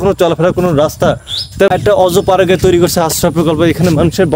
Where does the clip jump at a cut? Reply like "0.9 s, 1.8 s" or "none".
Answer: 1.7 s